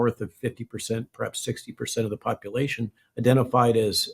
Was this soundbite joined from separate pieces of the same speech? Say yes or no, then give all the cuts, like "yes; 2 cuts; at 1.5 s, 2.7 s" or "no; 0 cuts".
yes; 1 cut; at 3.0 s